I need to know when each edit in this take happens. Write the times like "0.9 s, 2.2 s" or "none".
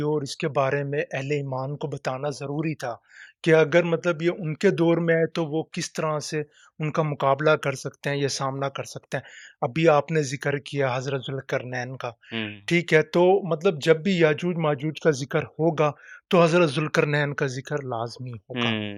none